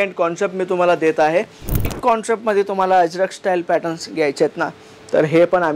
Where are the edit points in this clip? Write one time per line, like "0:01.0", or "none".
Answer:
0:01.9